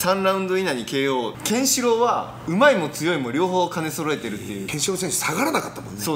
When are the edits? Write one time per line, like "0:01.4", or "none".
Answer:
0:01.3
0:04.7